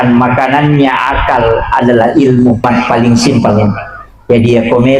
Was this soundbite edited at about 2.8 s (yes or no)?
yes